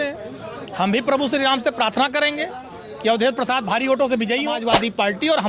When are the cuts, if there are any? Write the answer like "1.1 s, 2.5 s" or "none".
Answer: 4.5 s